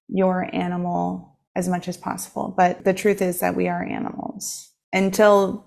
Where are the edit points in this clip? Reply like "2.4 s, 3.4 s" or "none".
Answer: 1.3 s, 2.8 s